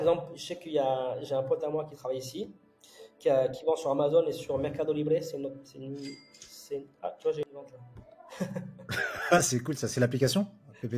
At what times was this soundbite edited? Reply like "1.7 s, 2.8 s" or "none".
none